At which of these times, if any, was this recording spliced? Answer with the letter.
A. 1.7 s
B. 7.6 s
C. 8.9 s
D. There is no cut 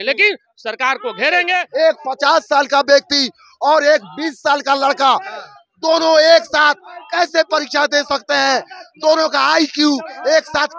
A